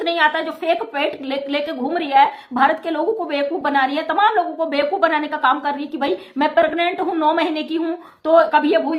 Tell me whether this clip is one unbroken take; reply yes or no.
yes